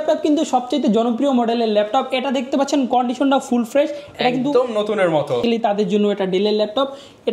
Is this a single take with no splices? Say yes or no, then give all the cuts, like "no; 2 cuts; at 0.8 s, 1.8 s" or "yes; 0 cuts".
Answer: no; 1 cut; at 5.4 s